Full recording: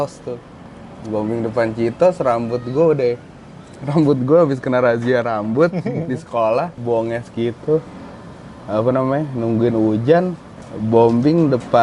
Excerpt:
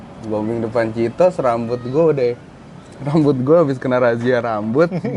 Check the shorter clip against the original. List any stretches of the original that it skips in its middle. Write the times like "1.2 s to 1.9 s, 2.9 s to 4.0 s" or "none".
none